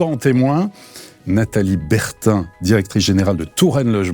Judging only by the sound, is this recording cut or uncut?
cut